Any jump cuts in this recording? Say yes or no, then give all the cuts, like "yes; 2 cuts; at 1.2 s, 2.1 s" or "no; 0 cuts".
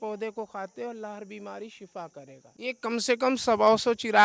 yes; 1 cut; at 2.6 s